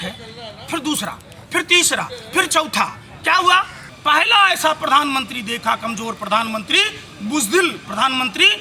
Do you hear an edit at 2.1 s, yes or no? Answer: no